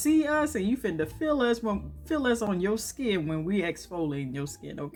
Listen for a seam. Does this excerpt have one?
no; 0 cuts

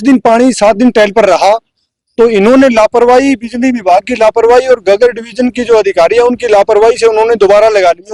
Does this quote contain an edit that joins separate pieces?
no; 0 cuts

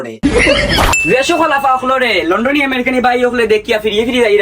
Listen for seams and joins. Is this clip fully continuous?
no; 1 cut; at 1.0 s

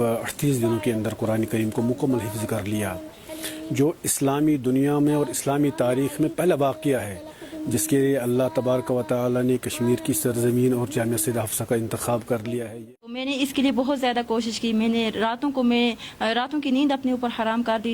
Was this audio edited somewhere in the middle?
yes; 1 cut; at 13.2 s

